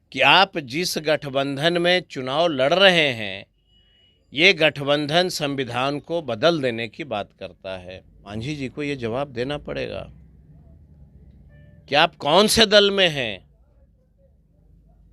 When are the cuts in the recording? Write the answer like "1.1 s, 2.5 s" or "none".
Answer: 8.3 s